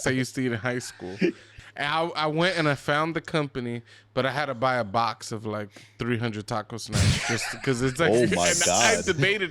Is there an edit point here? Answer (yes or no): yes